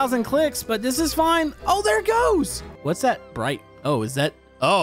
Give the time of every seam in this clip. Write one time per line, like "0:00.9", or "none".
0:02.7